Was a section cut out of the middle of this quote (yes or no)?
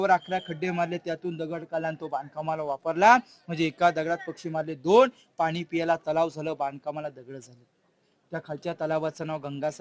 no